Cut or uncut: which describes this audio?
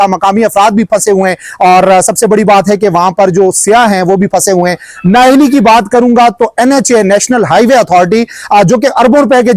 uncut